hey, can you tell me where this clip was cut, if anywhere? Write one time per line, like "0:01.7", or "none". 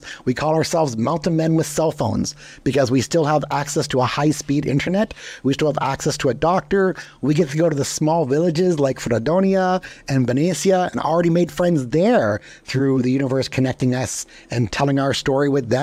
none

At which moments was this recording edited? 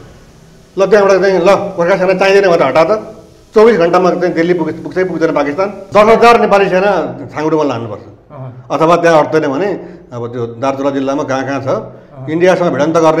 0:05.8

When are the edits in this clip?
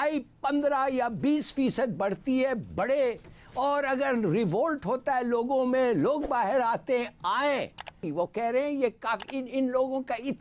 0:08.1

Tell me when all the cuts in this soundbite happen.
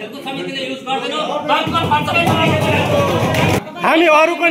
0:03.6

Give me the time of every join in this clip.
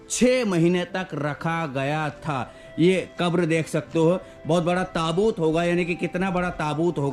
none

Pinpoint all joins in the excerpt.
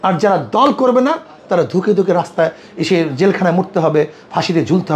none

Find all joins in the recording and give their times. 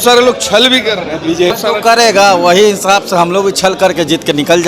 0:01.6

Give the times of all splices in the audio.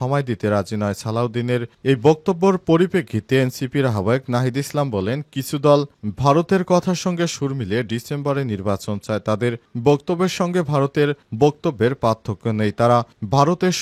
none

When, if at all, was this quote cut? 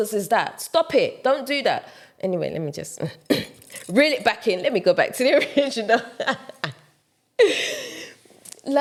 none

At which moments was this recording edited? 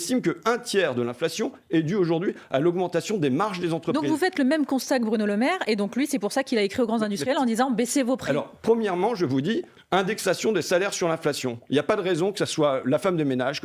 none

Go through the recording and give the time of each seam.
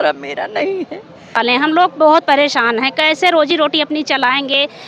0:01.3

